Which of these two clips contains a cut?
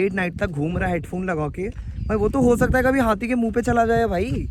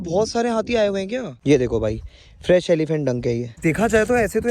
second; 2 cuts; at 1.3 s, 3.5 s

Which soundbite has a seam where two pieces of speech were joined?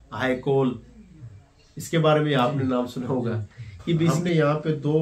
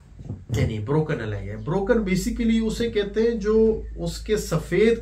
first; 1 cut; at 4.1 s

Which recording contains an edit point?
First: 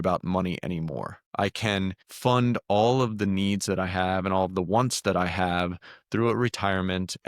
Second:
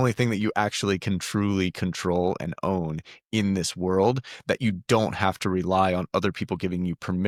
first; 2 cuts; at 1.2 s, 2.1 s

